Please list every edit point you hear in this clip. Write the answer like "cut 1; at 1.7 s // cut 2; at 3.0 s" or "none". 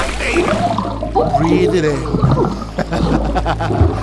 none